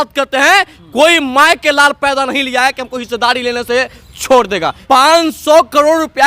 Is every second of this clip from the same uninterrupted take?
no; 1 cut; at 4.8 s

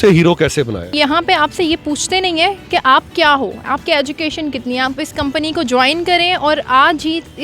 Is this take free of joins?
no; 2 cuts; at 0.9 s, 4.9 s

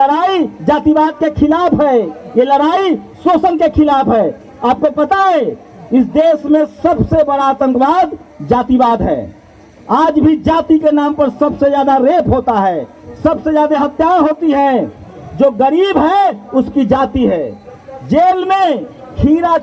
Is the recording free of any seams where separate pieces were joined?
yes; 0 cuts

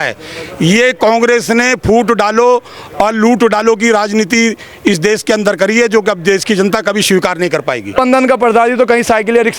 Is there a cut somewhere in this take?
yes; 1 cut; at 8.0 s

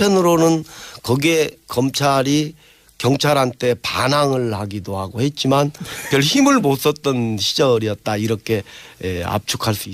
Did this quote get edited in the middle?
no; 0 cuts

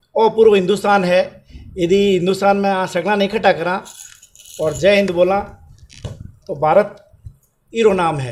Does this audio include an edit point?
no; 0 cuts

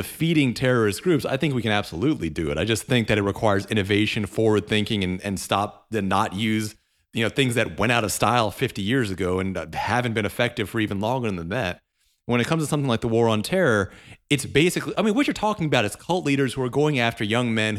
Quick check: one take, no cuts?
yes; 0 cuts

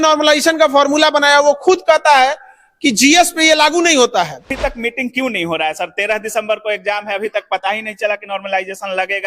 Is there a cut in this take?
yes; 1 cut; at 4.5 s

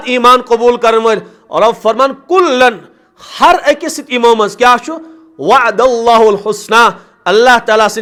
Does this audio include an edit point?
no; 0 cuts

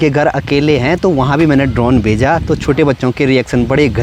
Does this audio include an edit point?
no; 0 cuts

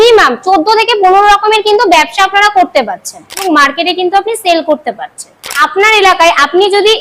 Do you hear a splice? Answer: yes; 2 cuts; at 3.4 s, 5.6 s

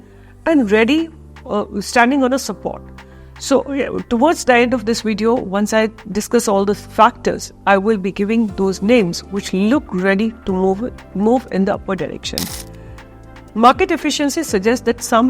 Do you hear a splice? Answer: no; 0 cuts

